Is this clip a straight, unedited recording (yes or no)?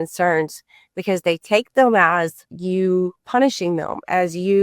no